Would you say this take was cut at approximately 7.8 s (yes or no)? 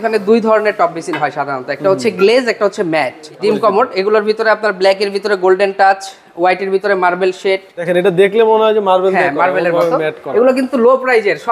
yes